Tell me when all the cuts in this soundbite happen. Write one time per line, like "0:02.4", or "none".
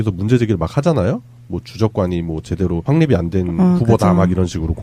none